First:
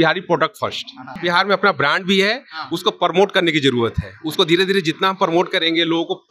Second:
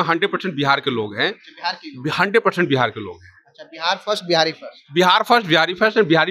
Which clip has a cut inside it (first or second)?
first